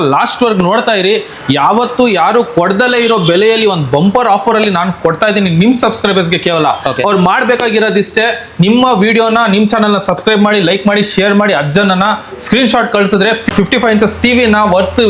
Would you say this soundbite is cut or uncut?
uncut